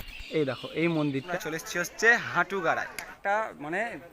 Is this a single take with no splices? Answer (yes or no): no